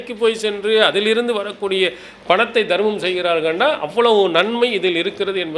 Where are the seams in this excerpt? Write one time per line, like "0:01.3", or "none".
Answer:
none